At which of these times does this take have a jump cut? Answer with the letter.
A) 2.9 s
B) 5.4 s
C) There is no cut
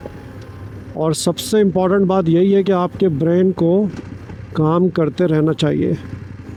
C